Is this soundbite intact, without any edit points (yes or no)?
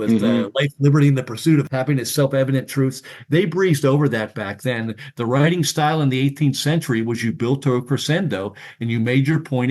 no